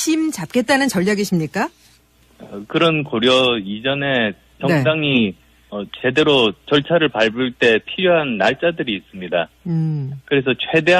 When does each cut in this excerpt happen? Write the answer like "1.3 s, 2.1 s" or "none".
9.5 s